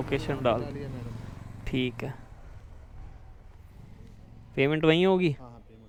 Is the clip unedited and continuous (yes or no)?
yes